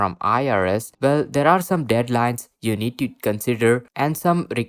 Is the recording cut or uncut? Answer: uncut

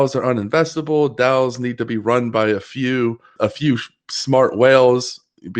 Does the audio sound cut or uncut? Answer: cut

